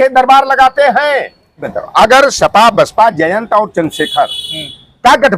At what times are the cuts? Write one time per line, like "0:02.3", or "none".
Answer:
0:01.7